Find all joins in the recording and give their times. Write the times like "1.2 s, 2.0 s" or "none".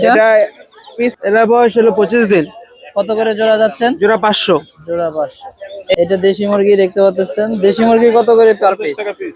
1.1 s, 6.0 s